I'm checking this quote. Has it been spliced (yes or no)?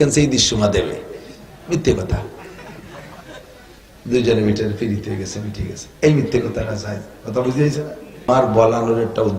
yes